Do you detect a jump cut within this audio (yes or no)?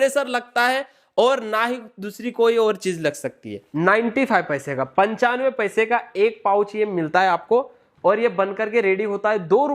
yes